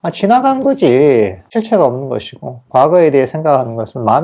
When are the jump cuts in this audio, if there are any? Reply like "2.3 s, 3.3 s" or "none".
none